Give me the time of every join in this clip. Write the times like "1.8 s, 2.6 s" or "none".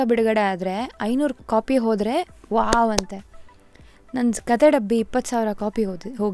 1.4 s